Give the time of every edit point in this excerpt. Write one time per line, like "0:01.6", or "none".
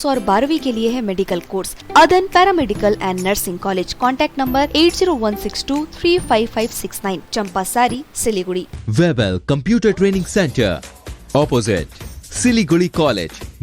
0:01.8
0:08.7